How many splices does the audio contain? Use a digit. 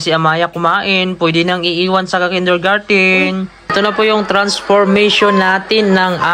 1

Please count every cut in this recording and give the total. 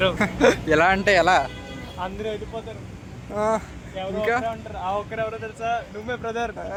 0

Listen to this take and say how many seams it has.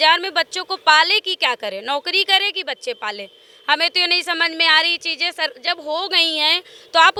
0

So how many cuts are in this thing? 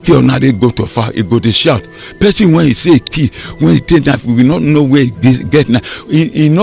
0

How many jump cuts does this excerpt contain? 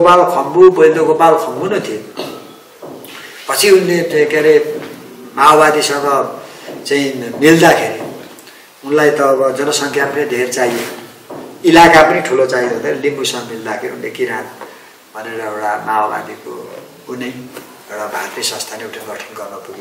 0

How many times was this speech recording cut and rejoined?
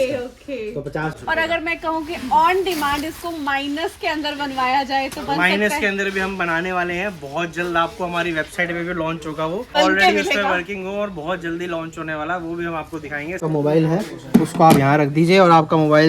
3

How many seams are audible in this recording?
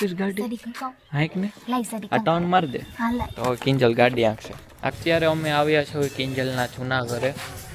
1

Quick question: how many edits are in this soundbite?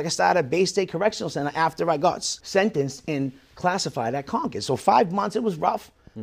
1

